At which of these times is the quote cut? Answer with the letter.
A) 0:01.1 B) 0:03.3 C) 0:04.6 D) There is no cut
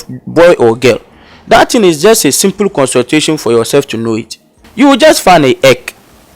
C